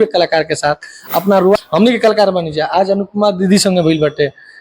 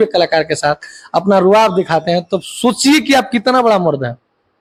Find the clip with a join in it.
first; 1 cut; at 1.6 s

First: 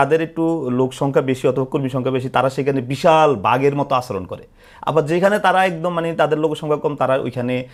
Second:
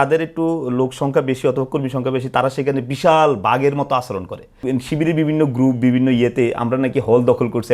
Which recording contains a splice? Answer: second; 1 cut; at 4.6 s

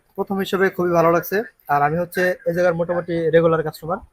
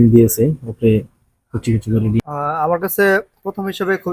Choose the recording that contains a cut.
second; 1 cut; at 2.2 s

